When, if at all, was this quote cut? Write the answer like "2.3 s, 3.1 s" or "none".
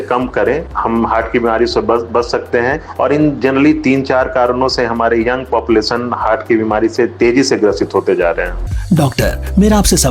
8.7 s